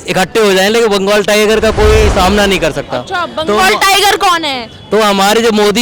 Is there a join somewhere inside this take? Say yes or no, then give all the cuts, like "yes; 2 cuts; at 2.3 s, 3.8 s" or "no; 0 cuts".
no; 0 cuts